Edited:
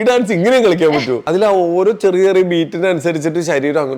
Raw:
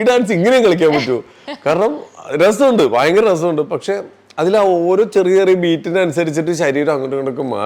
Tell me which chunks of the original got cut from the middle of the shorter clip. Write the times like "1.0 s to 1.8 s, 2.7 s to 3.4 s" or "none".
1.2 s to 4.3 s

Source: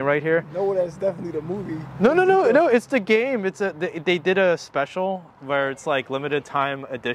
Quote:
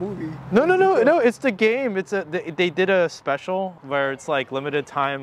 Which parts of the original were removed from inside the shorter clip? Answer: 5.3 s to 5.4 s

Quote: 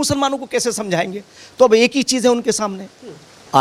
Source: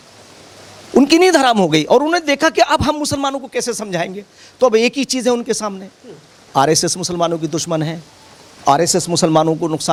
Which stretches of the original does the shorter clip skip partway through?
none

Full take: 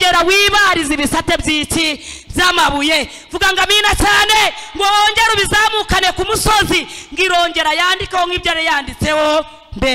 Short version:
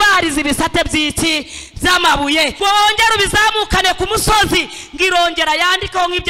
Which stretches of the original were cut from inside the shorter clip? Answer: 3.1 s to 4.7 s

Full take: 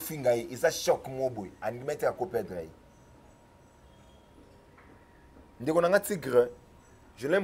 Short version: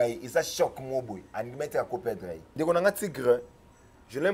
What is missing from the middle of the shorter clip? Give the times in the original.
2.7 s to 5.5 s

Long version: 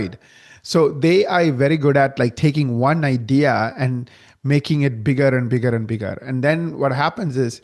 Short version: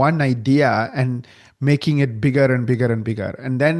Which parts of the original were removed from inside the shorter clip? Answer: none

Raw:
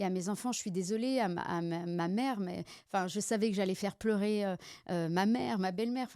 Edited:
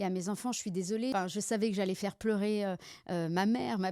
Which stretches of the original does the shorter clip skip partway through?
1.1 s to 2.9 s

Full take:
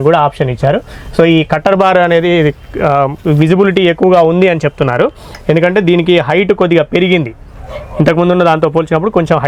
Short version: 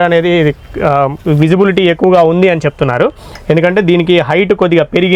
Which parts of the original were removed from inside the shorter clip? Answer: none

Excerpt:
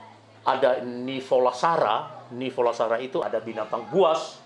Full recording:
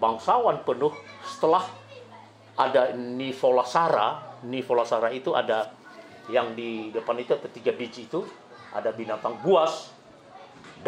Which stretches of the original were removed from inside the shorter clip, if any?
5.3 s to 8.7 s

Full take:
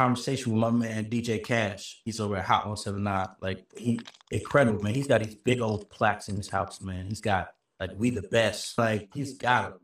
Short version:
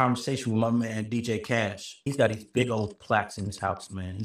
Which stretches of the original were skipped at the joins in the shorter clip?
2.0 s to 4.9 s

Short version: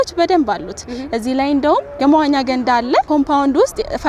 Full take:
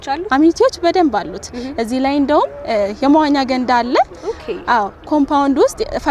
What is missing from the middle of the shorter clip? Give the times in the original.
2.6 s to 2.9 s, 4.1 s to 5.1 s

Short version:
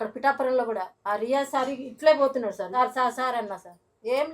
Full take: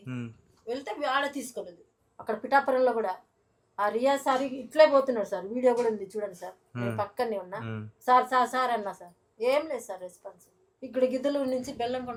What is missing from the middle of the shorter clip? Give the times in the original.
3.2 s to 3.7 s, 5.4 s to 8.0 s

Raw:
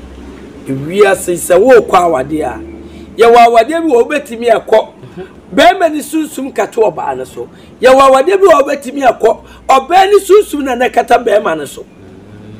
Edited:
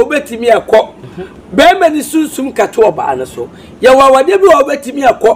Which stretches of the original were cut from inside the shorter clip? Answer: none

